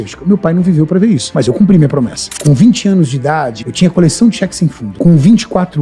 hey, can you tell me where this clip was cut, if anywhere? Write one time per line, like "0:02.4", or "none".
0:01.3
0:02.3
0:03.6
0:04.8